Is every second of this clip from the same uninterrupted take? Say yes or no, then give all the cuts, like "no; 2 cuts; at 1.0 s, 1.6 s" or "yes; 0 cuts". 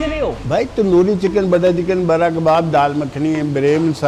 yes; 0 cuts